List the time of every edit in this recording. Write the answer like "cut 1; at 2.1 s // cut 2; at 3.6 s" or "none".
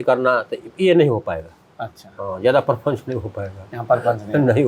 none